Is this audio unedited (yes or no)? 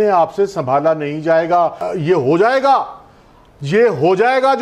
no